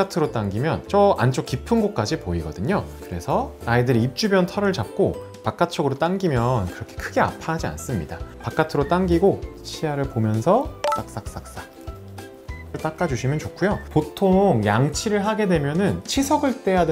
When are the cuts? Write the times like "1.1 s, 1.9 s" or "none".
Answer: 13.8 s